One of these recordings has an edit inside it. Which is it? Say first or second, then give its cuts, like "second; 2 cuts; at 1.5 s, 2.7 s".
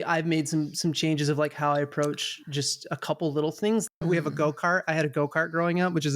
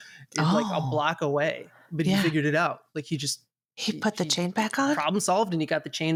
first; 1 cut; at 4.0 s